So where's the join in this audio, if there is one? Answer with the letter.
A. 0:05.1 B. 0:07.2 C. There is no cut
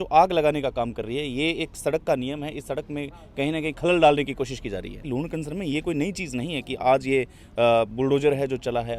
A